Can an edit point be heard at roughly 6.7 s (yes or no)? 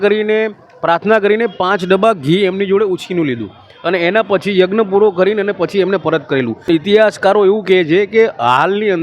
yes